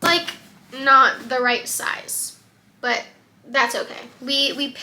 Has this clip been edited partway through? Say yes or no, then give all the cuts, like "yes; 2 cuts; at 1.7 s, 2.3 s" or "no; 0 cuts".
no; 0 cuts